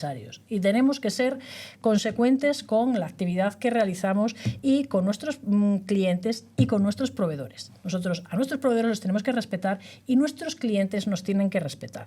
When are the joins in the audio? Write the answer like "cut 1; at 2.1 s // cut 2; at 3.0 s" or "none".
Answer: none

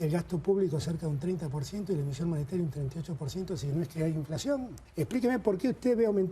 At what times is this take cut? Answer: cut 1; at 4.8 s

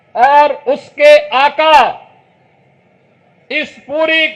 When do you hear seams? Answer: none

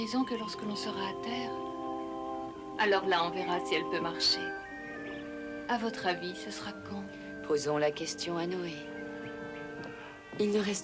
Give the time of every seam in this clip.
cut 1; at 5.3 s

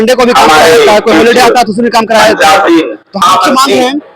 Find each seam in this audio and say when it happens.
cut 1; at 3.2 s

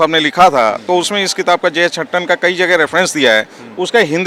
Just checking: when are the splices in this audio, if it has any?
none

